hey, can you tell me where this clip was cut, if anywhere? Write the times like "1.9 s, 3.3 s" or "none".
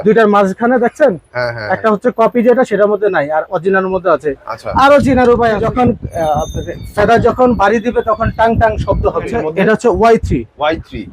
5.6 s, 9.4 s